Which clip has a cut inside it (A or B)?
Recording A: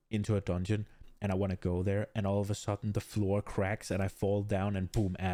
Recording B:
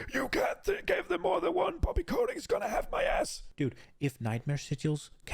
B